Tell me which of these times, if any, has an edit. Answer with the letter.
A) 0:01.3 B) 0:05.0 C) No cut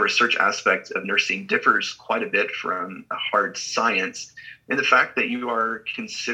C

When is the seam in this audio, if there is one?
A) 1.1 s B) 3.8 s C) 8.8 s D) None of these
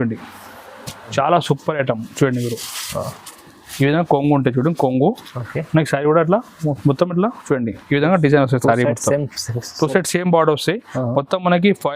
A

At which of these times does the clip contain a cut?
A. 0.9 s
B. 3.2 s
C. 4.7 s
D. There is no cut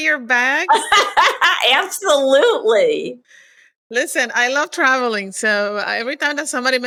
D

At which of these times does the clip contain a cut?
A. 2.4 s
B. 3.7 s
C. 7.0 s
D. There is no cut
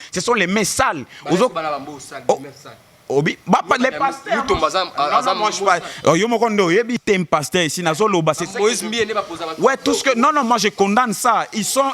C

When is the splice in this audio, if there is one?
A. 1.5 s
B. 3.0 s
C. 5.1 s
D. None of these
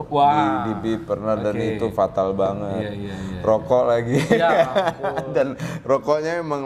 D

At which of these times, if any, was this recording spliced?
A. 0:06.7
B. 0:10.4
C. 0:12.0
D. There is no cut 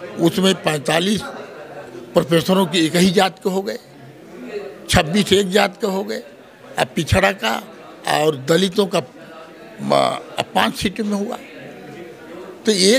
D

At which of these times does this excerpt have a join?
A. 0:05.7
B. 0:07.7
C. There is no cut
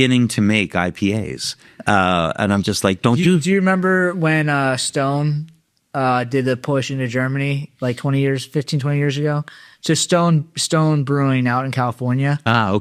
C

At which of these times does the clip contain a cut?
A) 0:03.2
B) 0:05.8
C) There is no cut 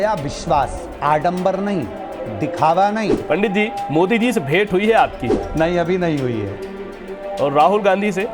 A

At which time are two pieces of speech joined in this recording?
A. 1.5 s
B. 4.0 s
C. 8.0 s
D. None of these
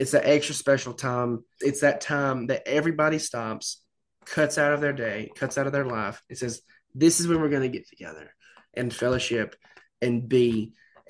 A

